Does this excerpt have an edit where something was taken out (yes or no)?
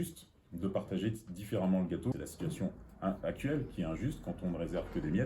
yes